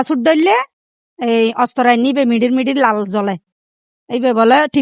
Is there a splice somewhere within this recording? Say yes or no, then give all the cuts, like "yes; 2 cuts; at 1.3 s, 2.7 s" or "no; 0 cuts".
no; 0 cuts